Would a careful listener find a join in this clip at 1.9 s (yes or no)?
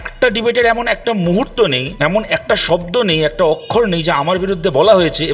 yes